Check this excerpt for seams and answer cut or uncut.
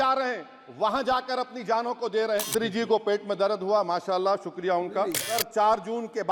cut